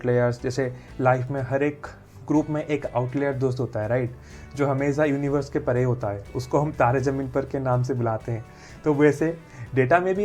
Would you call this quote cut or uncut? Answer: uncut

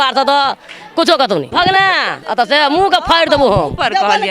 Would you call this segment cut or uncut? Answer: cut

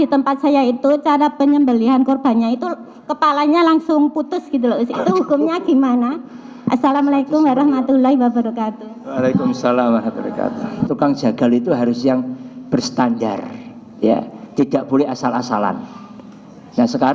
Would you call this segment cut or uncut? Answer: cut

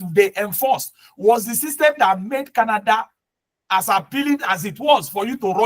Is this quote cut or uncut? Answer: uncut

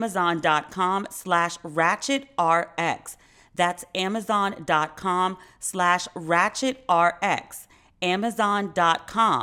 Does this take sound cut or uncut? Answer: uncut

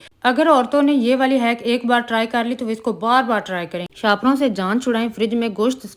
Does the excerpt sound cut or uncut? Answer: cut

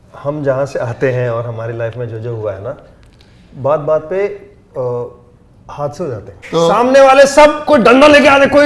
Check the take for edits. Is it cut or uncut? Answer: cut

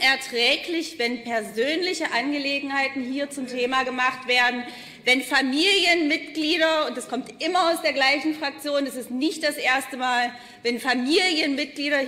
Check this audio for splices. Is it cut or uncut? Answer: uncut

